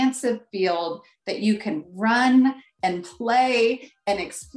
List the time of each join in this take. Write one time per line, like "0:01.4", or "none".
none

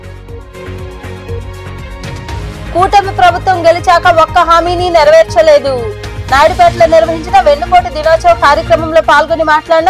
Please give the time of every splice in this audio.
none

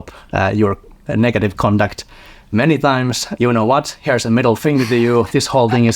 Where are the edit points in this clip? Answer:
0:03.3

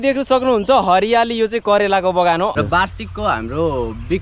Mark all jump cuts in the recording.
0:02.5

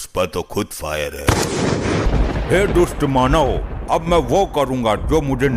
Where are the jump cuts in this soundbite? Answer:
0:02.1

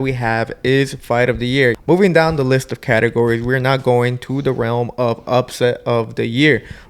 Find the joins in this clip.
0:01.8

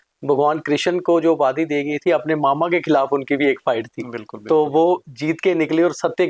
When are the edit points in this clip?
none

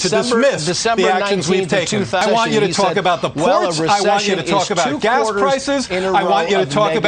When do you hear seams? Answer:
0:02.2

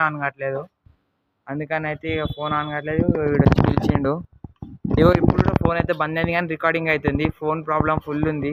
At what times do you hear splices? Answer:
none

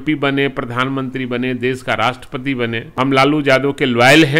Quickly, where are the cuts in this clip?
0:02.8

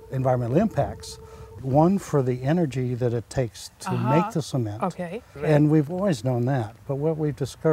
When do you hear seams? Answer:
0:01.6
0:05.3

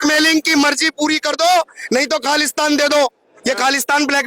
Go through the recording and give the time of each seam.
none

